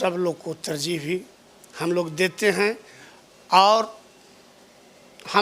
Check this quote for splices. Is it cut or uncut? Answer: uncut